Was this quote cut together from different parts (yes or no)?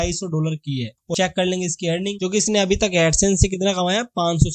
yes